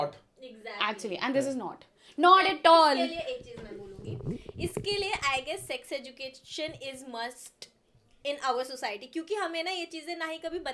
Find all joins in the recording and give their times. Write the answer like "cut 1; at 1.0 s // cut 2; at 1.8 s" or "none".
none